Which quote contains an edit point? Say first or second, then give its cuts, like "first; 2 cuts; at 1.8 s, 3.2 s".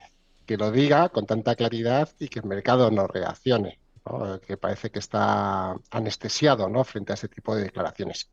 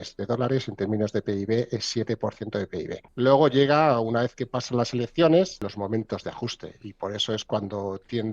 second; 2 cuts; at 3.0 s, 5.7 s